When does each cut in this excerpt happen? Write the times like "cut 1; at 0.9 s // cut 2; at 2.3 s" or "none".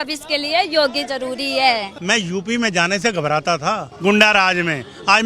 cut 1; at 1.9 s // cut 2; at 3.9 s